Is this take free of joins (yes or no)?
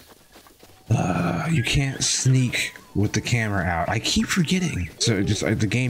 no